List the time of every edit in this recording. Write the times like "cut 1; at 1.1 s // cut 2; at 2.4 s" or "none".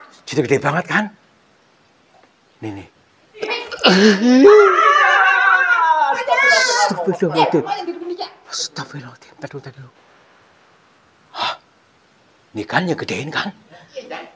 cut 1; at 3.4 s